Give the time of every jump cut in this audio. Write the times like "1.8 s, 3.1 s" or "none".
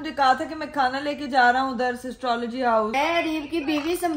2.9 s